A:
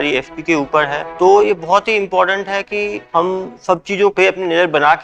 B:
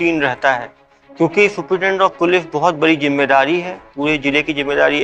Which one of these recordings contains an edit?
A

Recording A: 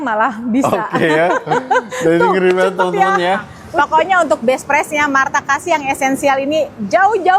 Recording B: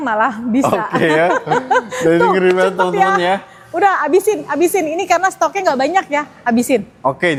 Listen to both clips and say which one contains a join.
A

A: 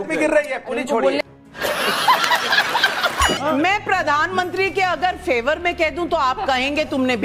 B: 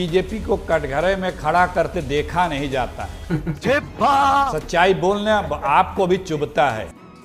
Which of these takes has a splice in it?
A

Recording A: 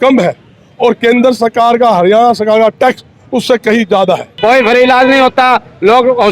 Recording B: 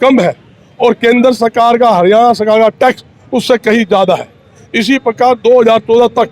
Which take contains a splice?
A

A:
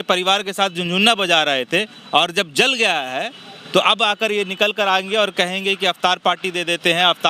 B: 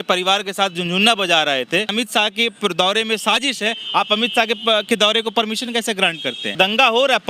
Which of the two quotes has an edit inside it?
B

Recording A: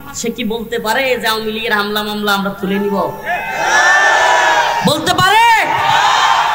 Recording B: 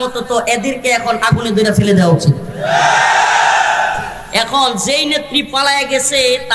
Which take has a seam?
B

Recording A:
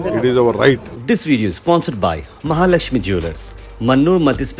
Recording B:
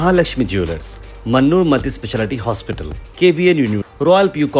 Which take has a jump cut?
A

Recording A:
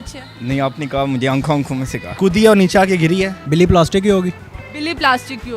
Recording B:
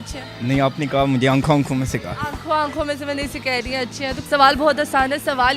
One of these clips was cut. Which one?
A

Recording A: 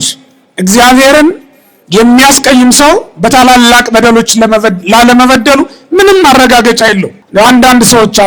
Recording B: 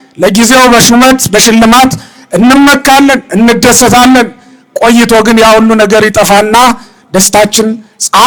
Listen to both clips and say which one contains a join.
A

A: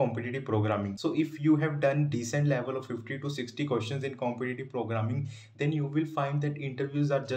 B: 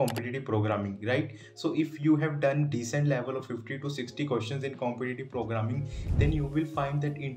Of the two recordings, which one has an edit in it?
A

